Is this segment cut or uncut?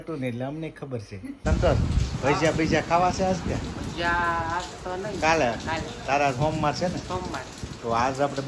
cut